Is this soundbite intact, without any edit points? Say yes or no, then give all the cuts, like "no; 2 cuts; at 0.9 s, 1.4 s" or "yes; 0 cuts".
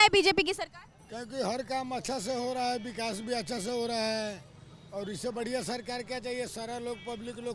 yes; 0 cuts